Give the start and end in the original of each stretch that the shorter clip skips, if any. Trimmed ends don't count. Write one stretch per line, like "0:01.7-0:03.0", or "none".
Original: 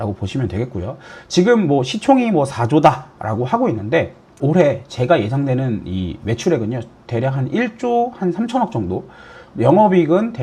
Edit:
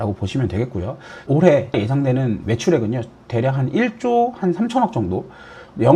0:01.1-0:04.2
0:05.0-0:05.7